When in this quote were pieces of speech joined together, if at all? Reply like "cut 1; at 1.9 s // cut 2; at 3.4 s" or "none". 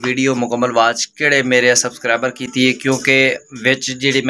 none